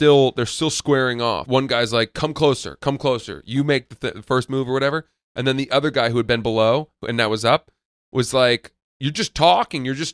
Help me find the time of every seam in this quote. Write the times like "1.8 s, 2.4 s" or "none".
1.4 s